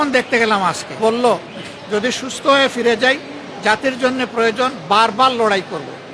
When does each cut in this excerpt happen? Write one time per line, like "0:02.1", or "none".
0:01.0